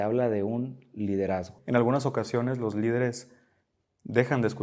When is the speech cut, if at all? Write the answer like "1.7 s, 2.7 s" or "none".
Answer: 1.5 s